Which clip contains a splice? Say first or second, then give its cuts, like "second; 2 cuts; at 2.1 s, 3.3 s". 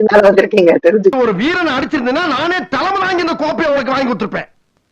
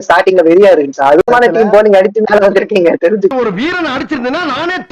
second; 1 cut; at 1.3 s